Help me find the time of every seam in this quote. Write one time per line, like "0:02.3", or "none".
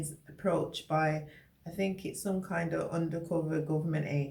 none